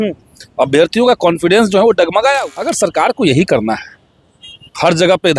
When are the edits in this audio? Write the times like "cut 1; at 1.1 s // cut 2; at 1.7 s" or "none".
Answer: cut 1; at 2.4 s